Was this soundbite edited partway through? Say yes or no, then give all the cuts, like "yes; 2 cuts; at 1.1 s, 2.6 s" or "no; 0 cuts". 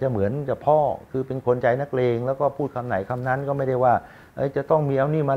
no; 0 cuts